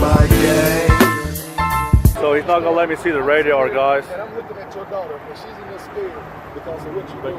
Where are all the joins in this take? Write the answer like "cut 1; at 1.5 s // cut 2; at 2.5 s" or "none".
cut 1; at 2.1 s